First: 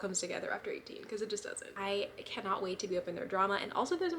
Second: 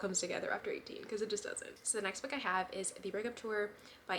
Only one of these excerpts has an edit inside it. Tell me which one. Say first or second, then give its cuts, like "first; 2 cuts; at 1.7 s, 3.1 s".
first; 1 cut; at 1.6 s